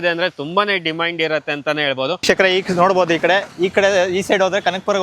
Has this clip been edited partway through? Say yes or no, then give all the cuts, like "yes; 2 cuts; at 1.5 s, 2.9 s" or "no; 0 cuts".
yes; 1 cut; at 2.2 s